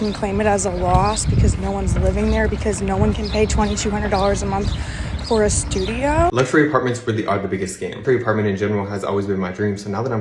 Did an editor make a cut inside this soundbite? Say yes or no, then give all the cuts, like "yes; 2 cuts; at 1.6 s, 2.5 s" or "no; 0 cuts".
yes; 1 cut; at 6.5 s